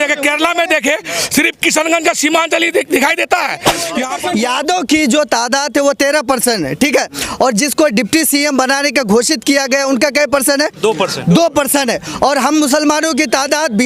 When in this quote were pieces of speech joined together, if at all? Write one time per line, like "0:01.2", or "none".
0:04.1